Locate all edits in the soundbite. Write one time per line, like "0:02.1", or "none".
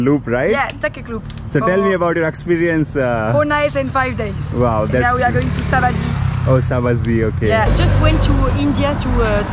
0:07.7